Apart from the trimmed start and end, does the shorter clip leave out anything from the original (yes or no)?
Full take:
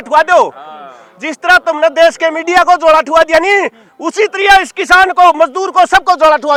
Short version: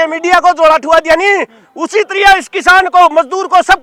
no